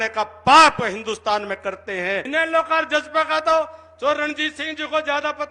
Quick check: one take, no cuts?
no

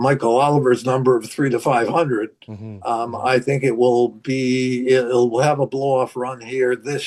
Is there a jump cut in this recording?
no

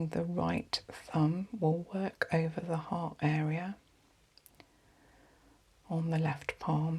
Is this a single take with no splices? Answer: yes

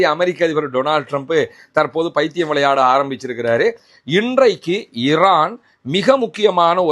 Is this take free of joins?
no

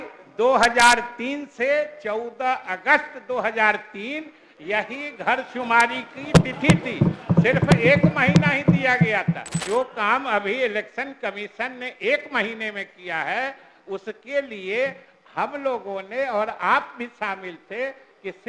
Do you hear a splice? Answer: yes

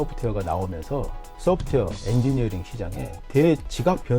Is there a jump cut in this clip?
no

